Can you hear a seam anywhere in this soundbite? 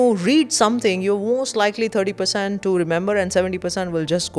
no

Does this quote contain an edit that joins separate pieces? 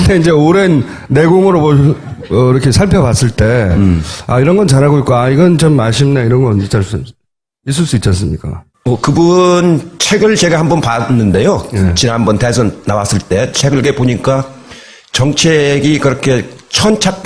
yes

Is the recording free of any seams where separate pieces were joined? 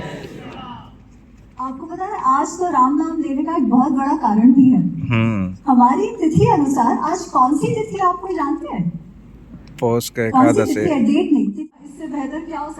no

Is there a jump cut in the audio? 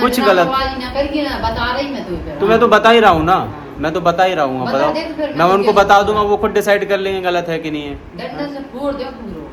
no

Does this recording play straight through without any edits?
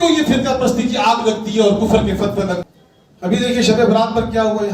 no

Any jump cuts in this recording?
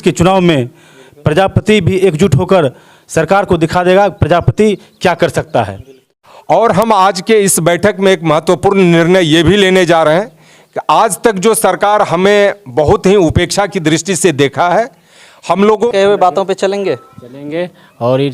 yes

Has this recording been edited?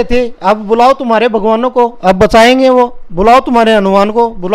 no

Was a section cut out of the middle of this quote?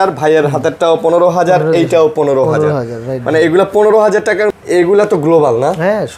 yes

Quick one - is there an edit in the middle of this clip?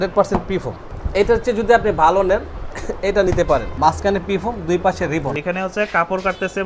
yes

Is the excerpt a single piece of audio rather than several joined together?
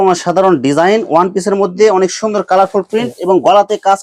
yes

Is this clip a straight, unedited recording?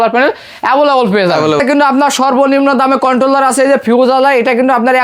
no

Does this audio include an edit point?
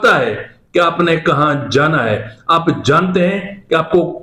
no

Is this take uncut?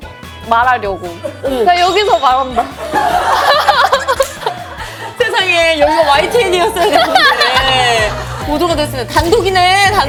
yes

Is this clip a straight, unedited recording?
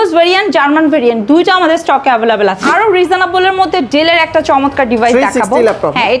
no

